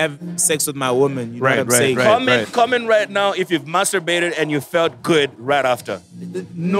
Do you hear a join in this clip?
yes; 1 cut; at 2.0 s

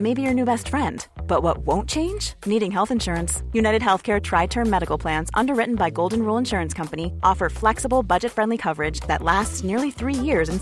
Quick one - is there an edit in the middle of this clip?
no; 0 cuts

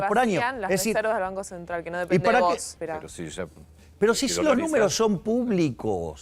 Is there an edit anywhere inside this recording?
yes; 1 cut; at 2.8 s

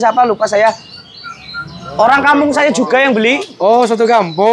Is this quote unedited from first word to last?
yes; 0 cuts

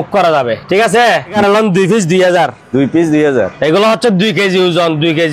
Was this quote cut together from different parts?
yes; 1 cut; at 1.4 s

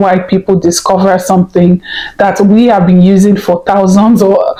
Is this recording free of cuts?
yes; 0 cuts

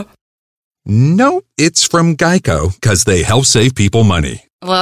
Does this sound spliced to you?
no; 0 cuts

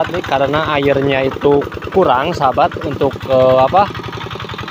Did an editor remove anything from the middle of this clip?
no; 0 cuts

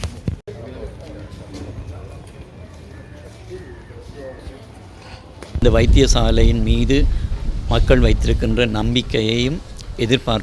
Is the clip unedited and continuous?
no; 1 cut; at 5.6 s

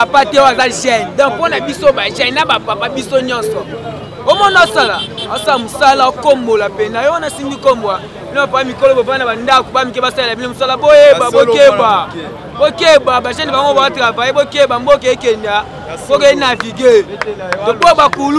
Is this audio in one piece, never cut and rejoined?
yes; 0 cuts

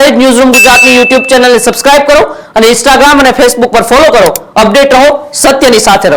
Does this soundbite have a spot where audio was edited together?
no; 0 cuts

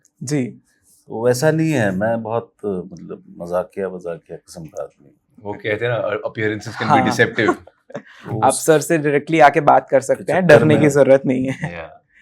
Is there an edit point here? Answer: no; 0 cuts

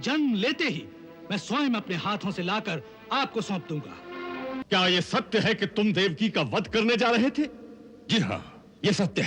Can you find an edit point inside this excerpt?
yes; 1 cut; at 4.6 s

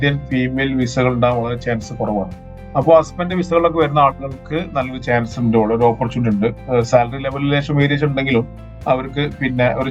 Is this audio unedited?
yes; 0 cuts

